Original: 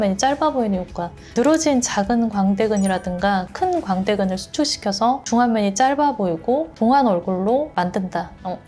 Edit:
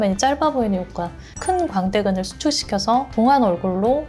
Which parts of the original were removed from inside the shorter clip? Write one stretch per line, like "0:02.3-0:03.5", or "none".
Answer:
0:01.3-0:03.4
0:05.2-0:06.7